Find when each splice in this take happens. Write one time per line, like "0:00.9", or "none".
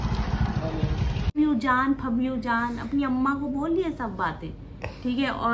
0:01.3